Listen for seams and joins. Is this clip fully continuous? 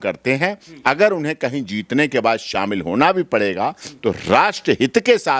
yes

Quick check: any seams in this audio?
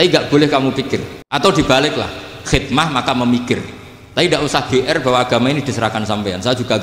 yes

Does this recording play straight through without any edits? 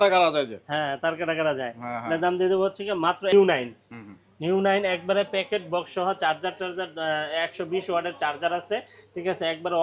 no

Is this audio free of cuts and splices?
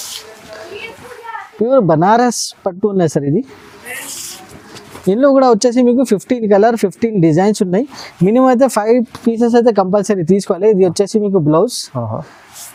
yes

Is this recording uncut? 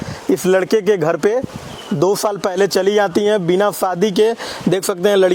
yes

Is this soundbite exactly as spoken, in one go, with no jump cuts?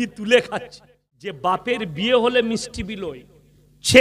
no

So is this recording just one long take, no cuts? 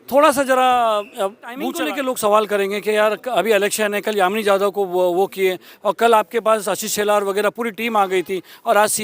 no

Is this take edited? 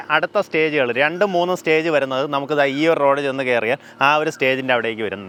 no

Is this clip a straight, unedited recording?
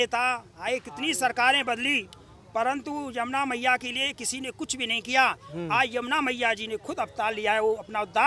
yes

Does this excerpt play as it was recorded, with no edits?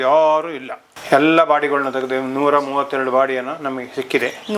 yes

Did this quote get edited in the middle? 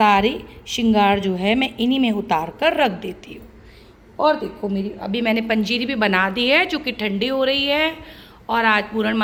no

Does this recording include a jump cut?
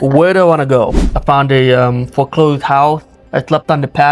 yes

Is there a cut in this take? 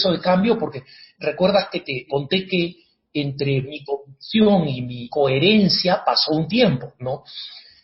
yes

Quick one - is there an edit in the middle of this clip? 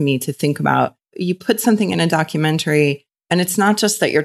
yes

